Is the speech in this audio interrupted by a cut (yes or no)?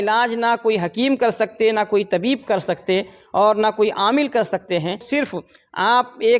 yes